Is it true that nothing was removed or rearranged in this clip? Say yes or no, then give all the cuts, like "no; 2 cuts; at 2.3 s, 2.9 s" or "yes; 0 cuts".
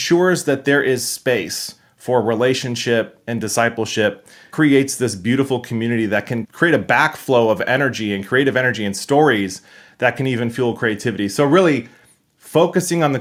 yes; 0 cuts